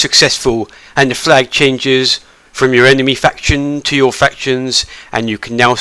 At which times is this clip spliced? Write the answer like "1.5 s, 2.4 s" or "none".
none